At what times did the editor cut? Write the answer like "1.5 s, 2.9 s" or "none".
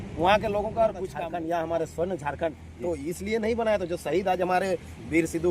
1.1 s

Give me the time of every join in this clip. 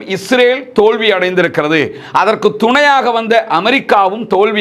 none

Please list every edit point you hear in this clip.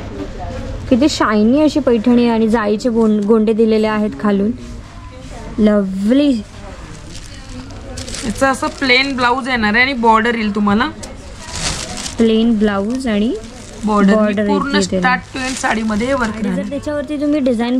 16.7 s

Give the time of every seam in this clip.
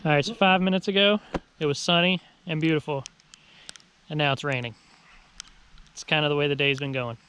none

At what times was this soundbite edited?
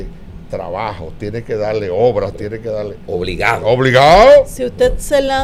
none

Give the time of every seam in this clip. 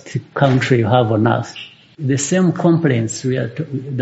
2.0 s

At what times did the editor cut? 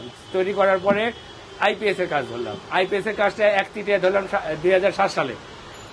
none

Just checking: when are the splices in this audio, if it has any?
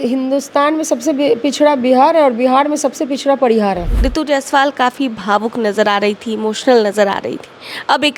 4.0 s

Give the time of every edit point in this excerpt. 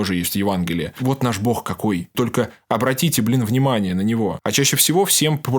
1.0 s, 2.1 s, 4.4 s

